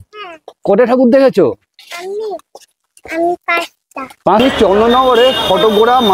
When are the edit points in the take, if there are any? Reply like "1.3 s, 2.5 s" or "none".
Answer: 4.4 s